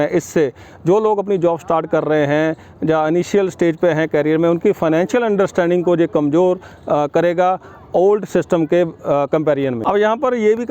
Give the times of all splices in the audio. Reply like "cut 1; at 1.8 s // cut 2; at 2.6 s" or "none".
cut 1; at 9.8 s